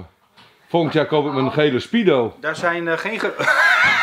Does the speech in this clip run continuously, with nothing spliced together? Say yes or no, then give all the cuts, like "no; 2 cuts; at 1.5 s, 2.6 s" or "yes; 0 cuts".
yes; 0 cuts